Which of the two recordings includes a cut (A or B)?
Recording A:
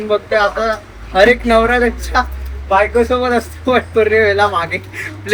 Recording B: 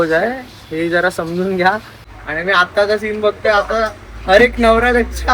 B